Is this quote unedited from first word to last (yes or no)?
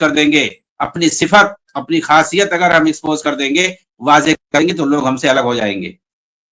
yes